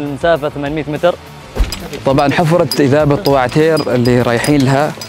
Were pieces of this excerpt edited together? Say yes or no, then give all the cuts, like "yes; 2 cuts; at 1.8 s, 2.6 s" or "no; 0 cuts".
yes; 1 cut; at 1.4 s